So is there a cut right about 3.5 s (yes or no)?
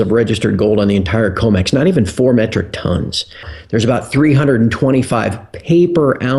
yes